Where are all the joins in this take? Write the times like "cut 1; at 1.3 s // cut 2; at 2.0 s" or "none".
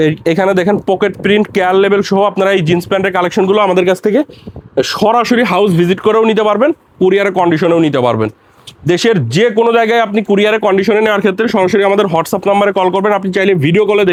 none